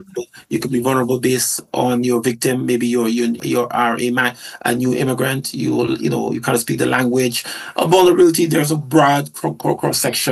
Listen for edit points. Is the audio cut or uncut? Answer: uncut